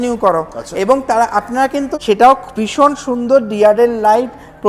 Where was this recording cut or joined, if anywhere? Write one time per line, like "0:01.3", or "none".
0:01.9